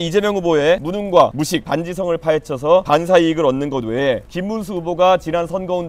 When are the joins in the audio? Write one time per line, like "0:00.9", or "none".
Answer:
0:00.9
0:01.5
0:02.8
0:04.3